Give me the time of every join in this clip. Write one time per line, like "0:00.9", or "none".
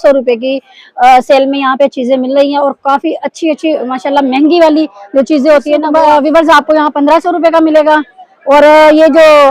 0:05.8